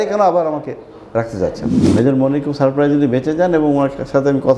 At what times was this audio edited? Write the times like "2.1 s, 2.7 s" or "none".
1.8 s